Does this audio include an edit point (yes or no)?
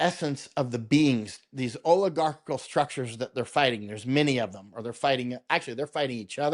no